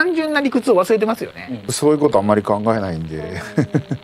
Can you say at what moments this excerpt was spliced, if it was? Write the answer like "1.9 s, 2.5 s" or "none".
1.7 s